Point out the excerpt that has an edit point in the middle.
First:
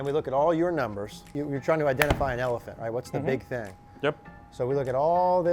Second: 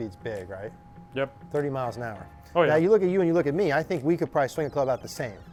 first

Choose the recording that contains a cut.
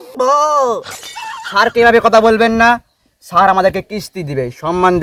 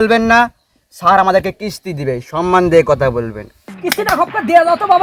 second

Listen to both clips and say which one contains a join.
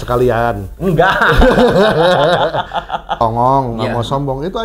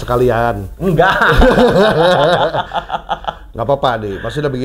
first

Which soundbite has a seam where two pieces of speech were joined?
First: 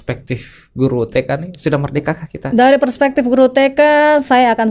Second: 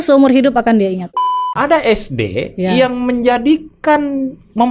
second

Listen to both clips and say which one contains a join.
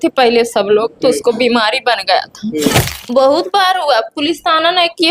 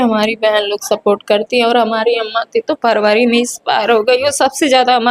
first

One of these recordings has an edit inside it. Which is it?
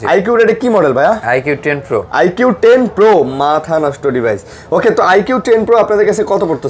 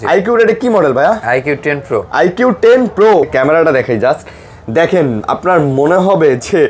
second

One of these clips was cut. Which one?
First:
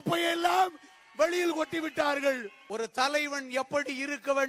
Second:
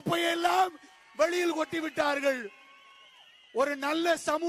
first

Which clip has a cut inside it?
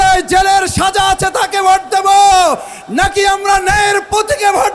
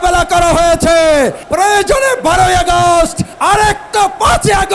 second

